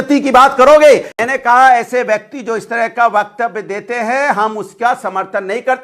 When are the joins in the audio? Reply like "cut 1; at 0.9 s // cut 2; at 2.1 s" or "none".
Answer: cut 1; at 1.1 s